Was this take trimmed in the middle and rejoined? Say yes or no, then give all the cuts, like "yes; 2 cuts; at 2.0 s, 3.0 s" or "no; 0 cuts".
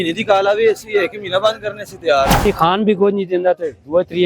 yes; 1 cut; at 2.5 s